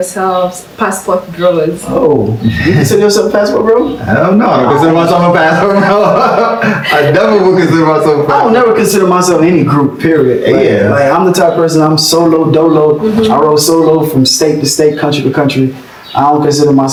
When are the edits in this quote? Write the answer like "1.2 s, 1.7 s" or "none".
none